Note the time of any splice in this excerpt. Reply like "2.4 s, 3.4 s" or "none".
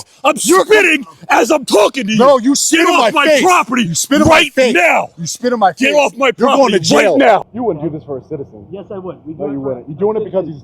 7.5 s

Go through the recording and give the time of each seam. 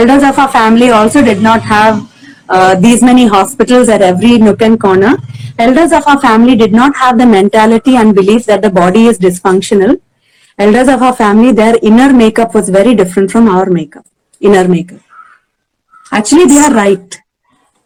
none

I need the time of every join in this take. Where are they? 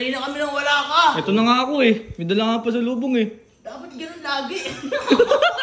none

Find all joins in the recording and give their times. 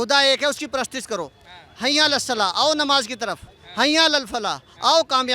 none

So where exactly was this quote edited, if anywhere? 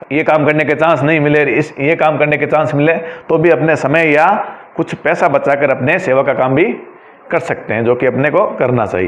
none

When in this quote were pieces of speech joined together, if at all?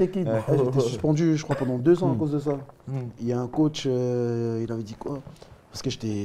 none

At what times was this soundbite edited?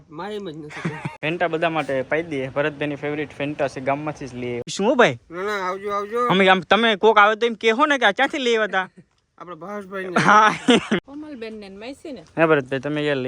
1.0 s, 4.7 s, 11.0 s

